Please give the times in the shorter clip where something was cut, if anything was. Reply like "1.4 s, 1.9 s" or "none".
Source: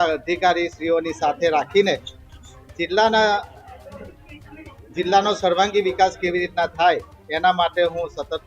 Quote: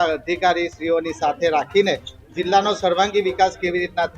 2.2 s

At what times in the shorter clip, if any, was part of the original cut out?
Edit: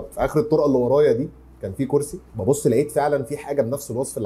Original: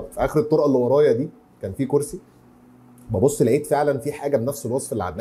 2.2 s

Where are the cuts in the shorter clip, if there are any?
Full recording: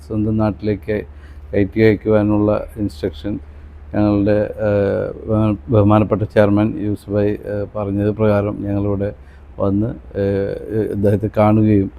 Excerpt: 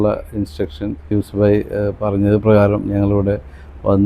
1.1 s

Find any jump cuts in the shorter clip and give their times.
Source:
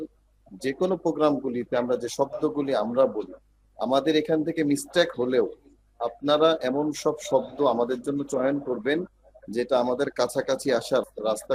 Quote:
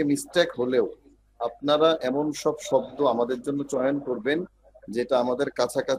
none

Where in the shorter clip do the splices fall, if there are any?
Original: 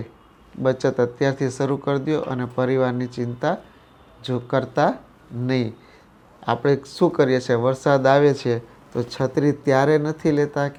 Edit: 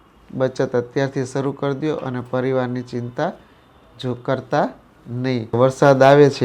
5.6 s

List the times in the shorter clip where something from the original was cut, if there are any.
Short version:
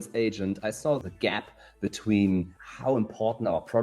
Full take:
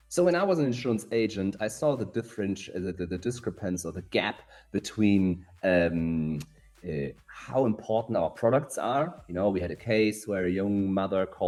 1.1 s, 2.6 s

